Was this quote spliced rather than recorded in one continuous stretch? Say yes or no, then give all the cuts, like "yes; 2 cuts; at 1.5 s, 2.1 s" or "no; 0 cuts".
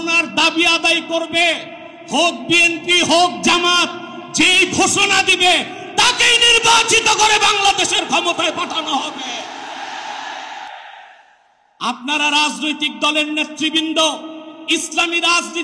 no; 0 cuts